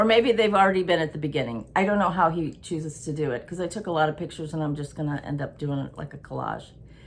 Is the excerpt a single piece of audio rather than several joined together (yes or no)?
yes